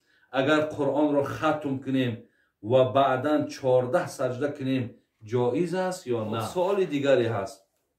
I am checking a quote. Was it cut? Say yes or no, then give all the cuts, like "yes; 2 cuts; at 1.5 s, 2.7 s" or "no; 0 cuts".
yes; 1 cut; at 6.5 s